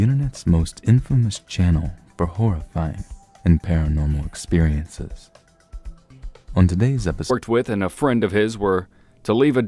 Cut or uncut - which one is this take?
uncut